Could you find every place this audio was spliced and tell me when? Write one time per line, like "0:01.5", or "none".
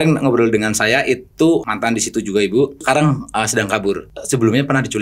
0:01.6
0:02.8
0:04.1